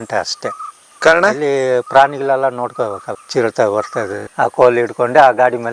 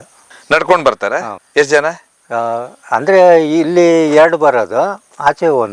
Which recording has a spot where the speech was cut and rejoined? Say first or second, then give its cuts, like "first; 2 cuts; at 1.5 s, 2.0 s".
first; 2 cuts; at 3.1 s, 4.3 s